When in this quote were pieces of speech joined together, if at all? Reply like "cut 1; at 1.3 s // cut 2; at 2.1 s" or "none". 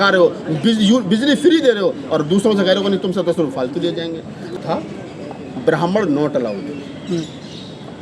cut 1; at 4.6 s